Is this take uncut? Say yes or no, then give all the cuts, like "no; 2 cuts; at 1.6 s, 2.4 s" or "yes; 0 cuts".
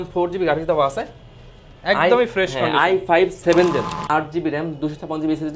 no; 1 cut; at 4.1 s